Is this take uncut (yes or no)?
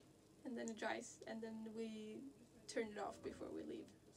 no